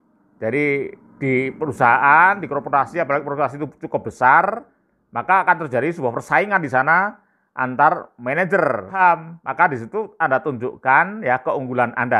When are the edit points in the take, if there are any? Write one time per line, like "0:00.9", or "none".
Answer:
0:08.9